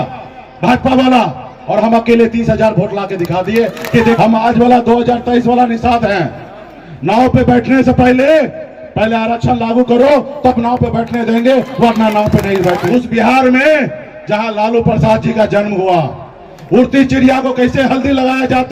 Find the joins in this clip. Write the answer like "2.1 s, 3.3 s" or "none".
4.2 s, 12.8 s